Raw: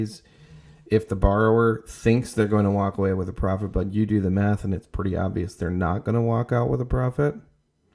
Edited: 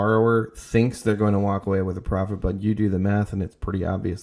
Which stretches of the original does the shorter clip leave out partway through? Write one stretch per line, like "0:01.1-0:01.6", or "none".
none

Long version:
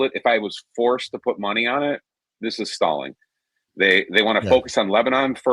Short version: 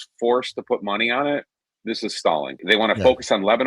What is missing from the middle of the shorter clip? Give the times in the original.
0:03.2-0:04.1

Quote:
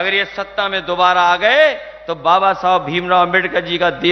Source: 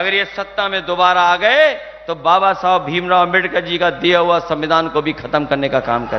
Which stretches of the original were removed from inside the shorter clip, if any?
none

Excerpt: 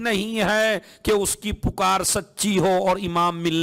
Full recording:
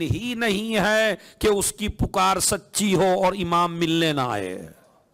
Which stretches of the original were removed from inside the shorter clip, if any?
none

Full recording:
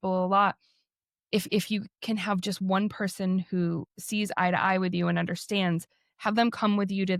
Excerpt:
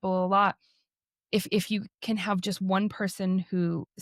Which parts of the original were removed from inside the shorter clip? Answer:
none

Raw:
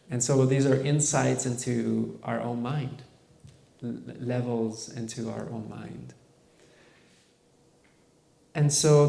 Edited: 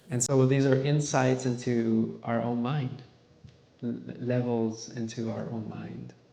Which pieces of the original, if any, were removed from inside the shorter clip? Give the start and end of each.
none

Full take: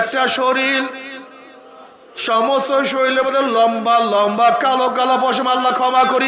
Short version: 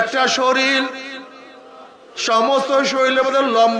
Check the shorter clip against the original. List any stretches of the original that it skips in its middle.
none

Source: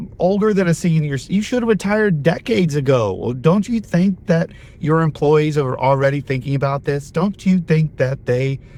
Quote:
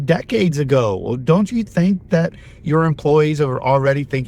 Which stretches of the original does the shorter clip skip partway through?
none

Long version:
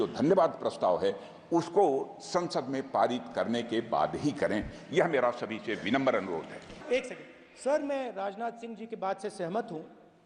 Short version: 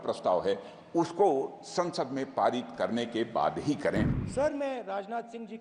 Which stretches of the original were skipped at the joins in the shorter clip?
0:04.8-0:07.5

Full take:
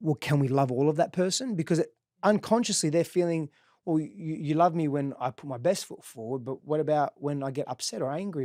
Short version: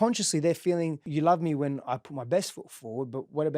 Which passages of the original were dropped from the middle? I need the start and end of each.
0:03.5-0:04.4

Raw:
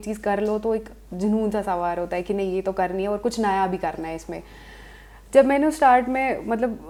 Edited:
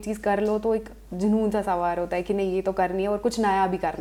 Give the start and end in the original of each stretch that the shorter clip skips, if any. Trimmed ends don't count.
none

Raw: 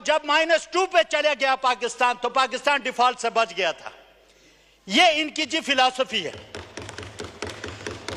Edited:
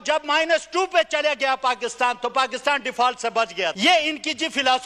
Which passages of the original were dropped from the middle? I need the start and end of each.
0:03.8-0:04.9

